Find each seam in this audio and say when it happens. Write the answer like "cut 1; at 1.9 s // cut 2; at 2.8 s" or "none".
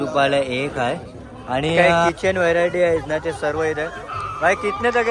cut 1; at 2.1 s